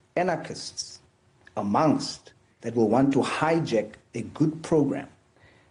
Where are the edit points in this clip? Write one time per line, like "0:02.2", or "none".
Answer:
none